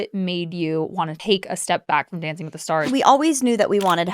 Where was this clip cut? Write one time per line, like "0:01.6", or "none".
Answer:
0:02.9